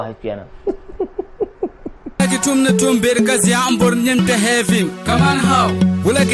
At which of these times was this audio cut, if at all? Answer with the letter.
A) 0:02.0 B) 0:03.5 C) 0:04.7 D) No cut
A